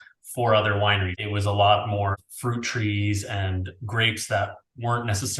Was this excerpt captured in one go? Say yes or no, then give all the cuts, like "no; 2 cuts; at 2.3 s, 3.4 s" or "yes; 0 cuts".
no; 2 cuts; at 1.2 s, 2.1 s